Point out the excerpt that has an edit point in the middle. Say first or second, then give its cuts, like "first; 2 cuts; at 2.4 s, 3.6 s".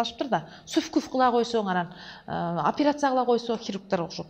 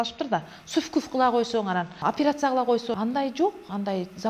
second; 2 cuts; at 2.0 s, 2.9 s